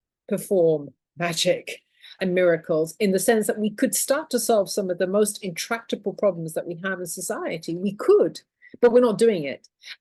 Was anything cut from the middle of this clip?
no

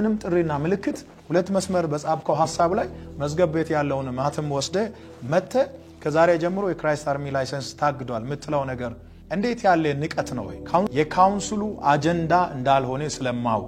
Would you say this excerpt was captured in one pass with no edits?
no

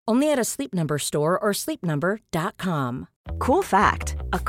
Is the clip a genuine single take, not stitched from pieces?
no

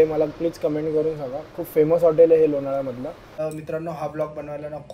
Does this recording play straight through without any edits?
no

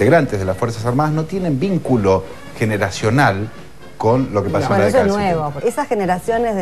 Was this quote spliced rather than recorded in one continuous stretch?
yes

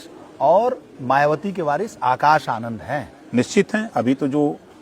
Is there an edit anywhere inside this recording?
no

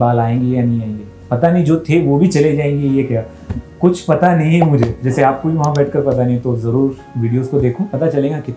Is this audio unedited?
yes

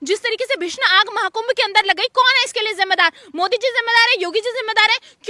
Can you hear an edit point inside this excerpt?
no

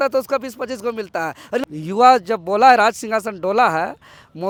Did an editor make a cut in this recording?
no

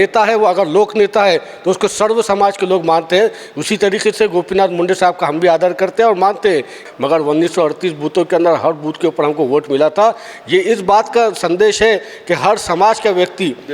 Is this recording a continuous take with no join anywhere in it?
no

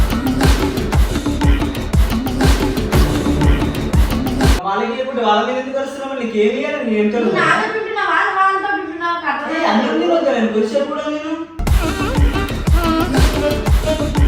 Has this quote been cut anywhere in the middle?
yes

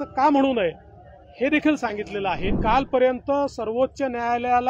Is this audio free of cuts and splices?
no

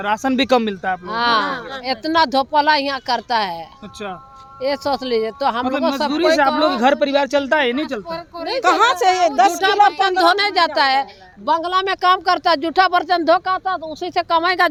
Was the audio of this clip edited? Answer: no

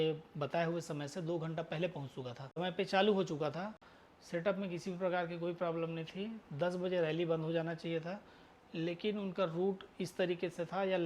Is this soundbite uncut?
no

